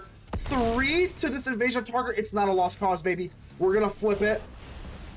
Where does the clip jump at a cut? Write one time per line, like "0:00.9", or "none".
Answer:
none